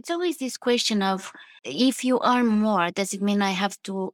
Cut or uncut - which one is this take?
uncut